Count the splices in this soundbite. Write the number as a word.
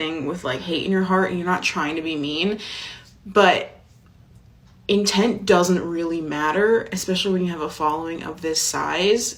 zero